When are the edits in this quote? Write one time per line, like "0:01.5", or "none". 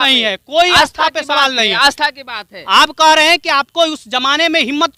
none